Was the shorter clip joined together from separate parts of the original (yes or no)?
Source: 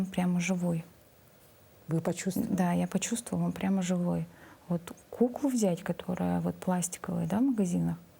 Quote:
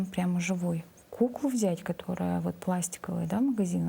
yes